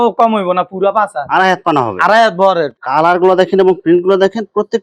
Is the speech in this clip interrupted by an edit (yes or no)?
yes